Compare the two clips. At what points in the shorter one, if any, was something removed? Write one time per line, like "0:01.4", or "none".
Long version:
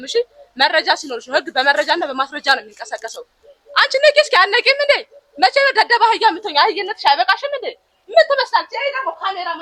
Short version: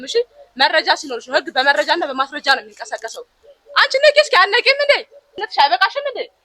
0:05.3